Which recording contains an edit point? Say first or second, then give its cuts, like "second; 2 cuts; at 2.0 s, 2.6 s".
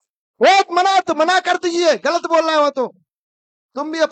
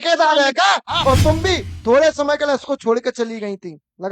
second; 1 cut; at 0.9 s